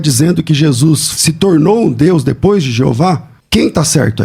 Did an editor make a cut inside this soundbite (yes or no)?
yes